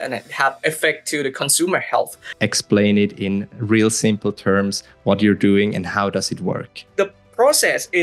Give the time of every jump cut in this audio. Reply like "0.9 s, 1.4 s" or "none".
2.3 s, 6.9 s